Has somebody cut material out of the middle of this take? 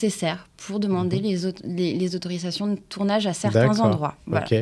no; 0 cuts

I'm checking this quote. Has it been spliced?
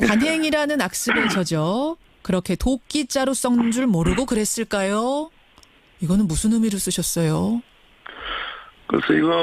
yes; 1 cut; at 1.5 s

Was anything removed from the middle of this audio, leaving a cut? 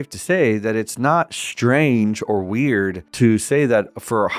yes; 1 cut; at 3.0 s

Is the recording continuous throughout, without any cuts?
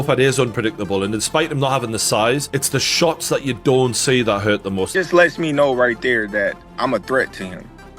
no; 1 cut; at 4.9 s

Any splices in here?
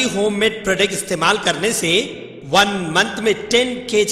no; 0 cuts

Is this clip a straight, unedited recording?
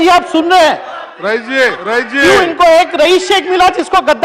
no; 1 cut; at 1.8 s

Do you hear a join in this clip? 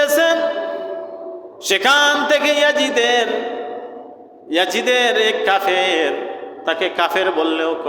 no; 0 cuts

